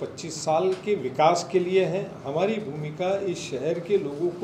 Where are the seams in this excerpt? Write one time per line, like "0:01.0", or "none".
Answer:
none